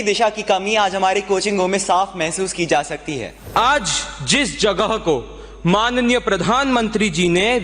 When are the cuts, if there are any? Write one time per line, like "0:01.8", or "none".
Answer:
0:03.3